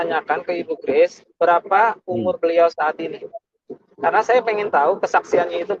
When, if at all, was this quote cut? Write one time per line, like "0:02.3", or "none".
none